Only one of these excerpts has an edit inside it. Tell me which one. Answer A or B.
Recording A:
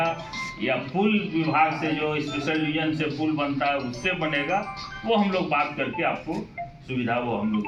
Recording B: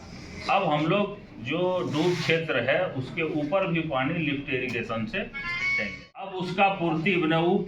B